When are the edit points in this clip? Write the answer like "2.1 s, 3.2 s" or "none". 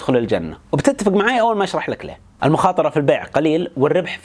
2.2 s